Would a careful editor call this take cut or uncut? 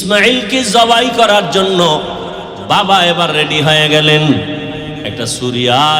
uncut